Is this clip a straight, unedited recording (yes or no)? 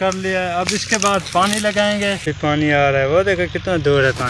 yes